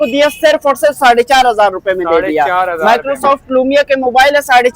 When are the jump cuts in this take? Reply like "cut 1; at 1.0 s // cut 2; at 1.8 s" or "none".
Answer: none